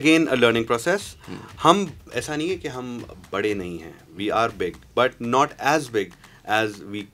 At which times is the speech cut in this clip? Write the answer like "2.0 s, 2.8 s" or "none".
none